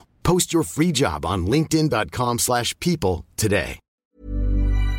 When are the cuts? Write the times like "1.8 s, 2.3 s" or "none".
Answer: 4.1 s